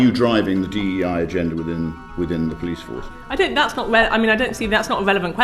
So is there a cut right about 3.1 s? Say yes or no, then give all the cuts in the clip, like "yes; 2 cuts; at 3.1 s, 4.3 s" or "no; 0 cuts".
yes; 1 cut; at 3.1 s